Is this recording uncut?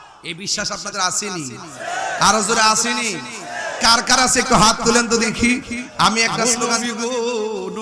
no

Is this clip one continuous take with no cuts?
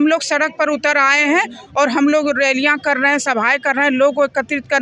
yes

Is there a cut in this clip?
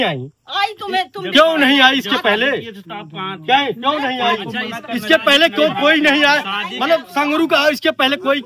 no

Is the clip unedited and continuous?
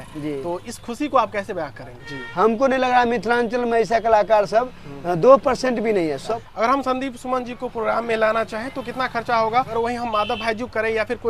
no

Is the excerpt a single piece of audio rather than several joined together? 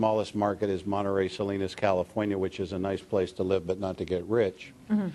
no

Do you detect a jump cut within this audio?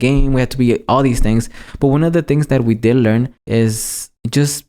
yes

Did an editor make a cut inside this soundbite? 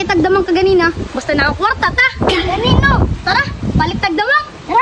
no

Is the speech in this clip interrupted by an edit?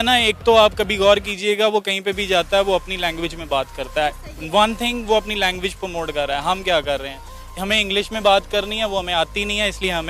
no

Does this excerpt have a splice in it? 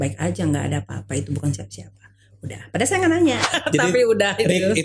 yes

